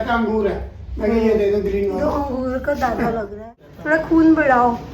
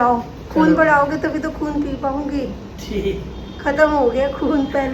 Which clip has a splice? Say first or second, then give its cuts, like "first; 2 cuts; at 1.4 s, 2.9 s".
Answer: first; 1 cut; at 3.6 s